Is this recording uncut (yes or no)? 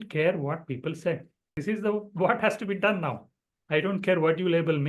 no